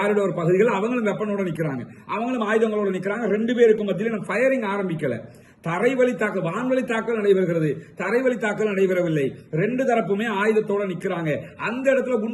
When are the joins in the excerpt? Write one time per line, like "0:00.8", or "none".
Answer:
none

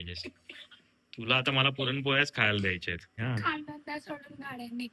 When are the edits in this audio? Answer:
0:03.1

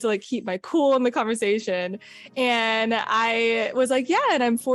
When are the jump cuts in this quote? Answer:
none

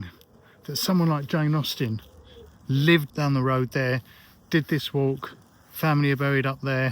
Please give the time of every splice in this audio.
0:03.1

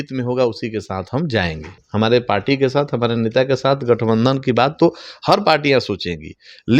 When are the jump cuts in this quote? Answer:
0:01.8

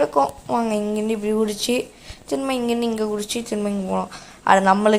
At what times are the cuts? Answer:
none

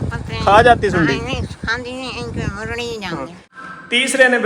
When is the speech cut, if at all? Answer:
0:03.4

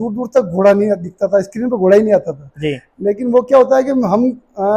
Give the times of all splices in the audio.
none

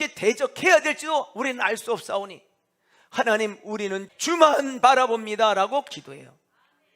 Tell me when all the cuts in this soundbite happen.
0:04.1

